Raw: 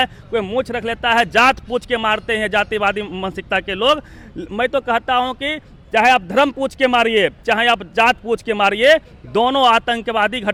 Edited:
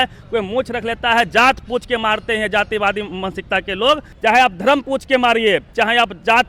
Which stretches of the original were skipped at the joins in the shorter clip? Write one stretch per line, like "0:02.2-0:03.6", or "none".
0:04.1-0:05.8